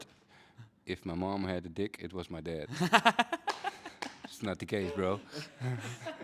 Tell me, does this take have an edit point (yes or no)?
no